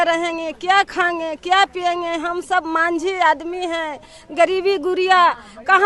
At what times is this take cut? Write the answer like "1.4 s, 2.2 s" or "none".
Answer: none